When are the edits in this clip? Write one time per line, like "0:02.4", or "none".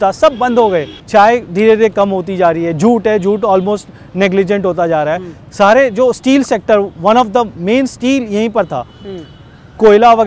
0:00.9